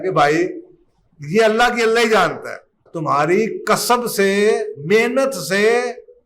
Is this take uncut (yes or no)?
no